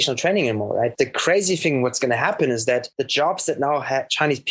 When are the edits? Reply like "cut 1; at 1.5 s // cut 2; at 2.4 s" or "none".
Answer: cut 1; at 0.9 s // cut 2; at 3.0 s